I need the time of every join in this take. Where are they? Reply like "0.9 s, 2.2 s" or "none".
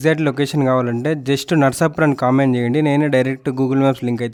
none